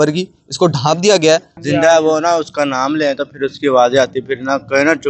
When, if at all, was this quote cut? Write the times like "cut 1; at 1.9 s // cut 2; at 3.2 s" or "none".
cut 1; at 1.5 s